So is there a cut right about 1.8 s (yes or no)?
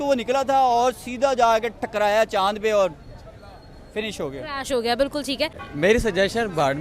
no